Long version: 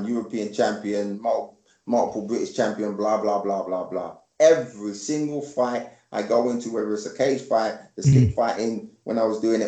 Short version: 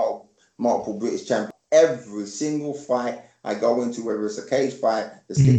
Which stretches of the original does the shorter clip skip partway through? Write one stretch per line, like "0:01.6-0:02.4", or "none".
0:02.8-0:04.2

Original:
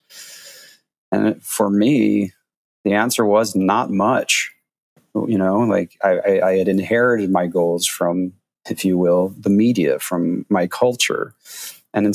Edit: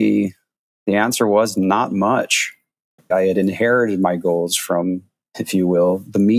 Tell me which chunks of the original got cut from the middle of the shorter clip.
0:05.1-0:06.4

